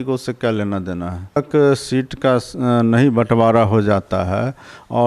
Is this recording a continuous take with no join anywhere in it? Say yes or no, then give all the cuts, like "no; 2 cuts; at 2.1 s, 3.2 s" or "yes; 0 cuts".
no; 1 cut; at 1.4 s